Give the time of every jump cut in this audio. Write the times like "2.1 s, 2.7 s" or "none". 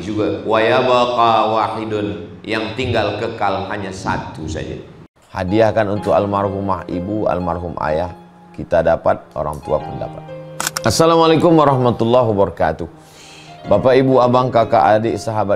5.1 s